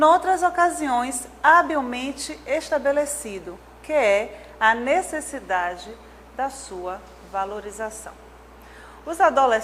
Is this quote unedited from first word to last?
no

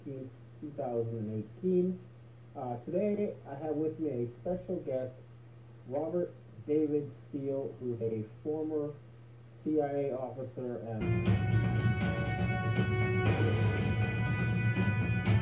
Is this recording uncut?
yes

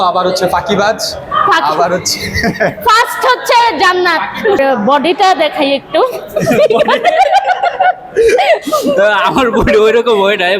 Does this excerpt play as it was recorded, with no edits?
no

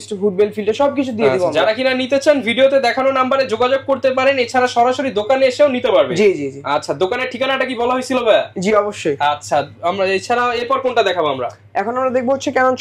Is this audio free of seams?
yes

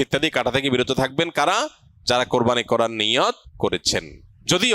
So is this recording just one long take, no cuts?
no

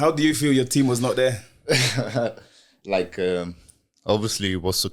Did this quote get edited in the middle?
no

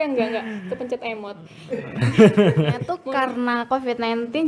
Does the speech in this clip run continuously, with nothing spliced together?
no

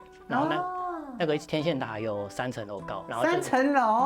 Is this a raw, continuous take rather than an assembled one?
no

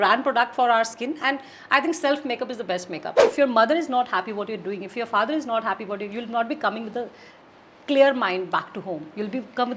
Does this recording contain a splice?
yes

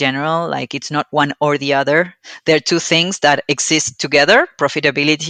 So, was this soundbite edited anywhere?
no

